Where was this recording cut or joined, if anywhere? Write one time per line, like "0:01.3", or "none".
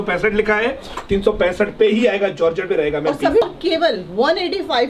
0:03.5